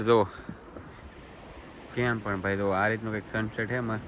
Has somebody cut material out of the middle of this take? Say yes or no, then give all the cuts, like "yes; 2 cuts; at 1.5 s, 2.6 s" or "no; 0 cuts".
no; 0 cuts